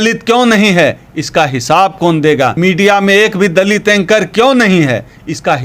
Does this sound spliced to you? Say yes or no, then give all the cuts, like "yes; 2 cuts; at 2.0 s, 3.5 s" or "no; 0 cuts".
yes; 1 cut; at 2.5 s